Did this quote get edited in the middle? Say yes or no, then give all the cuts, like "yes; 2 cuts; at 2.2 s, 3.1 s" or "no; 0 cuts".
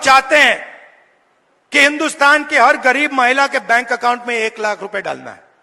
no; 0 cuts